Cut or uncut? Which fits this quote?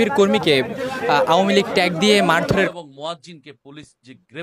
cut